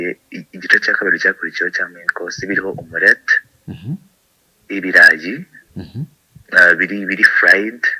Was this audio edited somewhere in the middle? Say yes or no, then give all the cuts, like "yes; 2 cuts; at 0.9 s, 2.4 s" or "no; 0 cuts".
no; 0 cuts